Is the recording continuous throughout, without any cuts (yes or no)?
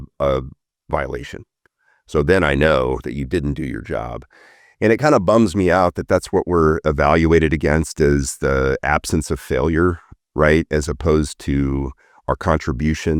yes